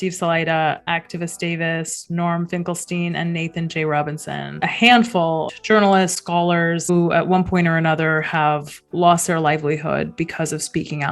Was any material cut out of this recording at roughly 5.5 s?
yes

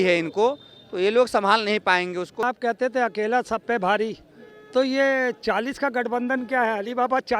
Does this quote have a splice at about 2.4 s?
yes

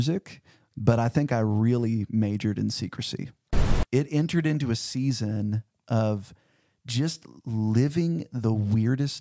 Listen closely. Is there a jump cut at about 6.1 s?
no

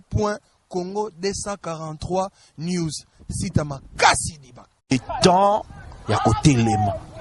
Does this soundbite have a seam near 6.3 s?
no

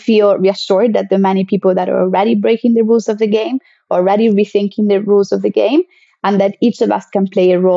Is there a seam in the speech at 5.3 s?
no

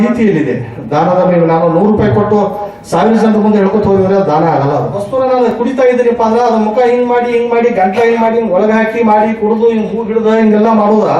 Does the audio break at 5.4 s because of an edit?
yes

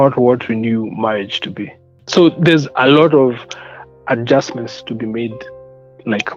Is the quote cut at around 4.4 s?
no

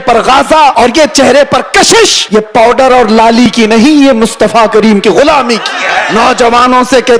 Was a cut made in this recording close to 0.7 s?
yes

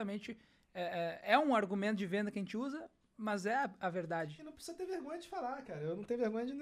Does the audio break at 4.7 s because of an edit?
no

